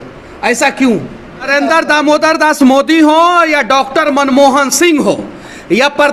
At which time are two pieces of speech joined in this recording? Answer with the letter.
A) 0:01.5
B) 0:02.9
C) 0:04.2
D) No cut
A